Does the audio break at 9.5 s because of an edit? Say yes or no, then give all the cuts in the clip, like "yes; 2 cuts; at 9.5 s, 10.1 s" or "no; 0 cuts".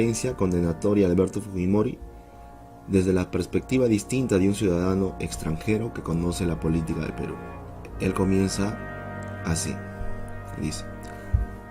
yes; 1 cut; at 9.5 s